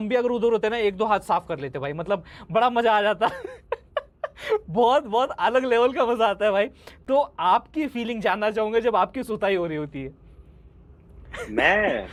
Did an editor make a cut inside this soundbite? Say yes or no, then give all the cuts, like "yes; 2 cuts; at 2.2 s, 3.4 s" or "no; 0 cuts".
no; 0 cuts